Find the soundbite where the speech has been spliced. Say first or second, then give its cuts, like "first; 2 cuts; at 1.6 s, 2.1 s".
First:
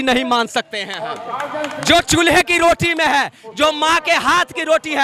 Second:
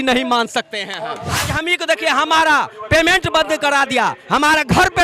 second; 1 cut; at 1.5 s